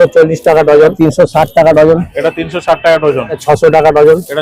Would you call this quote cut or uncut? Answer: cut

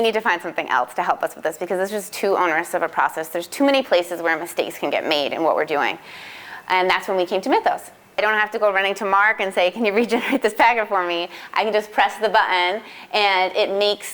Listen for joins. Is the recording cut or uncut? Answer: cut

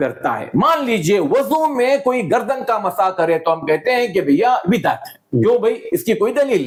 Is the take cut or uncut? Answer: uncut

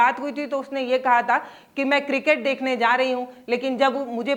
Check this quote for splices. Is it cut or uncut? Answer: uncut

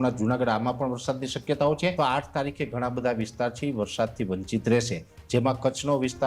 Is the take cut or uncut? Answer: cut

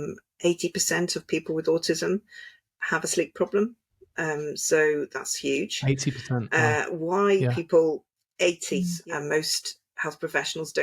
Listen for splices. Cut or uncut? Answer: cut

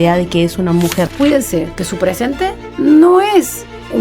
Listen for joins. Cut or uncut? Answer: cut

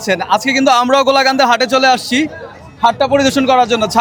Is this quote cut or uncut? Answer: uncut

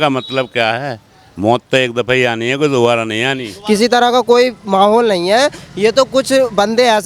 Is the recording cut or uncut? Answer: cut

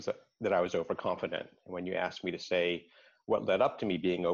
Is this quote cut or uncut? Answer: uncut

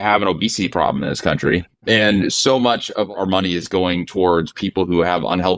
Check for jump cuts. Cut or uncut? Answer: cut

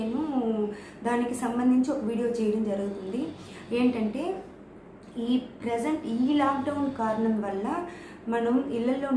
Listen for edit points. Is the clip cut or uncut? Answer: uncut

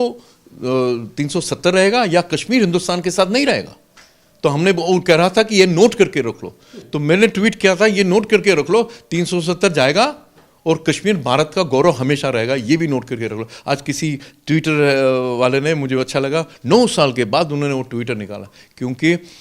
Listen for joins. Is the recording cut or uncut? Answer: uncut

